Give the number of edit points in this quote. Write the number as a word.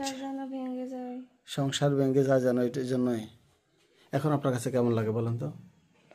one